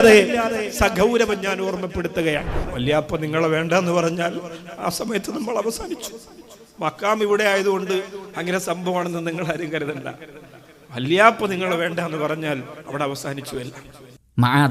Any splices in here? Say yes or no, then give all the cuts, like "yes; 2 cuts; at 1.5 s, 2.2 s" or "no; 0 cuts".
yes; 2 cuts; at 2.6 s, 13.8 s